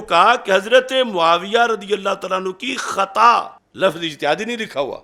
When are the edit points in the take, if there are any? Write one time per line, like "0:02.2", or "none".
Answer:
0:03.6